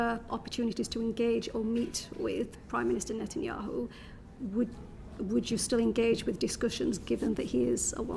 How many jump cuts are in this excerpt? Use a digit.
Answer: 0